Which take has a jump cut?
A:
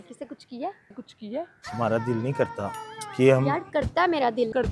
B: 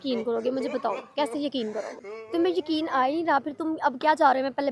A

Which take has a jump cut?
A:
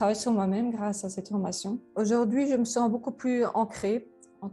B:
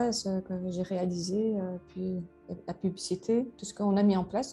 A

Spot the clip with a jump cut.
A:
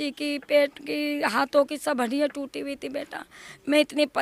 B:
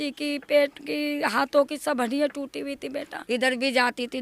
B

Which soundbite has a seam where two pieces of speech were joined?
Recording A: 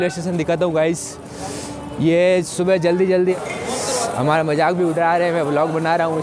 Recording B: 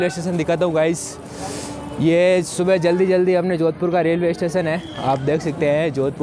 A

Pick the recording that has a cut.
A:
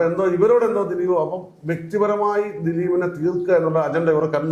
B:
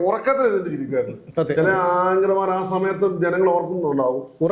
B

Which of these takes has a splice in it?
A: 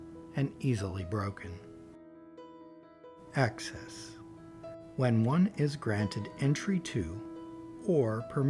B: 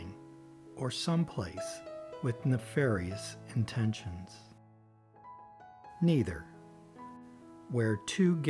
A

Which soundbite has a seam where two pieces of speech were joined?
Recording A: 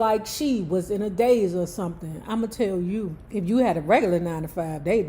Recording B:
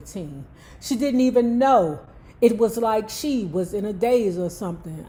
A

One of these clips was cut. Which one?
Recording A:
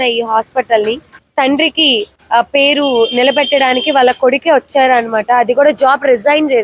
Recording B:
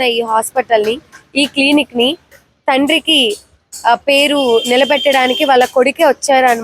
A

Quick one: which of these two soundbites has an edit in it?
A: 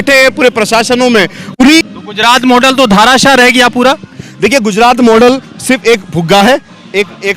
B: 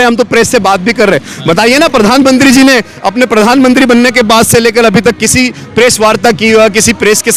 A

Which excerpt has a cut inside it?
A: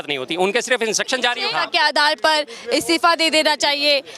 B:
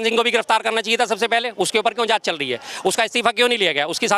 A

